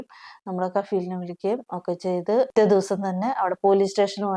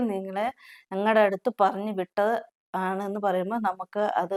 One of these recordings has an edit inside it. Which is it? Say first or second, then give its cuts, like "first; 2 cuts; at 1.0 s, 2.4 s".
first; 1 cut; at 2.5 s